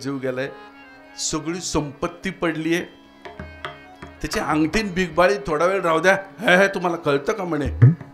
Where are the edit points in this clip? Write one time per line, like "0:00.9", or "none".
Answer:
none